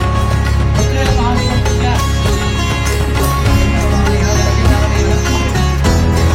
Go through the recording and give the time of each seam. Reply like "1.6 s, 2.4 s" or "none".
none